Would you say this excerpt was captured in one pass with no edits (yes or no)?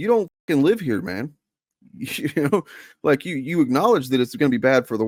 yes